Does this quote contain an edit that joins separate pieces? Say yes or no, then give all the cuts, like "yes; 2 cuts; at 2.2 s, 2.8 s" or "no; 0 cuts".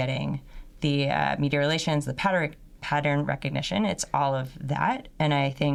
no; 0 cuts